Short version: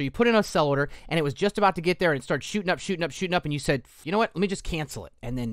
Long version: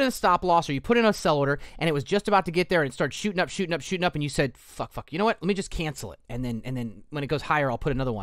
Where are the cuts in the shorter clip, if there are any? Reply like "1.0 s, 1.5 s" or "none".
3.9 s